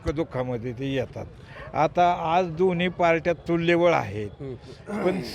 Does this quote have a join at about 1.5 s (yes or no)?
no